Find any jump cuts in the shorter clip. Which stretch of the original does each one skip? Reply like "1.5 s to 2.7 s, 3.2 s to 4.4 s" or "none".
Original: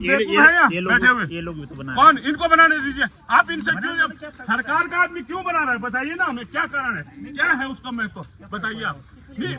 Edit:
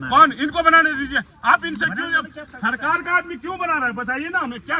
none